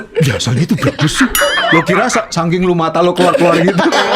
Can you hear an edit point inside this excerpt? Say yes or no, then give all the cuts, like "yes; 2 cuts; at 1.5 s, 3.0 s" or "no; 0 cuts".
no; 0 cuts